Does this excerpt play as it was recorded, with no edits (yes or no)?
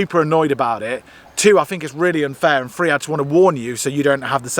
yes